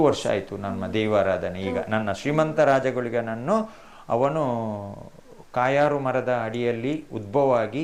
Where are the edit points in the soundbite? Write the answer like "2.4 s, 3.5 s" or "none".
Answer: none

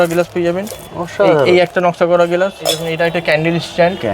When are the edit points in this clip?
2.8 s

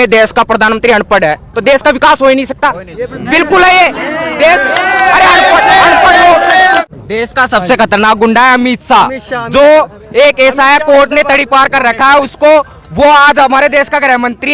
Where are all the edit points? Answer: 1.5 s, 6.9 s

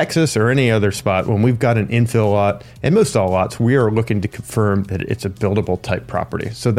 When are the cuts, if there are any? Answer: none

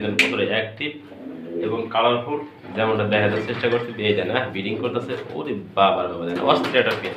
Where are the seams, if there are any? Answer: none

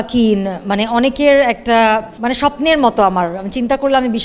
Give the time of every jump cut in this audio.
2.1 s

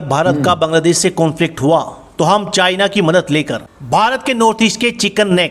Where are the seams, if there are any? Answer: none

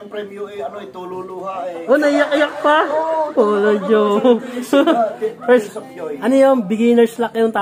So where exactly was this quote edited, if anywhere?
none

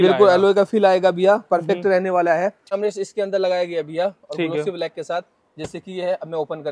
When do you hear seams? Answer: 2.7 s

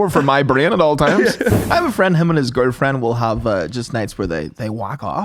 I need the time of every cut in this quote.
1.6 s

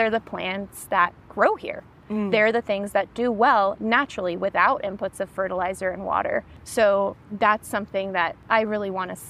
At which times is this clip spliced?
6.6 s, 7.2 s, 8.4 s

